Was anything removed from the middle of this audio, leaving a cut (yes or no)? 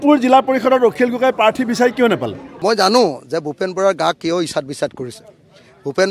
yes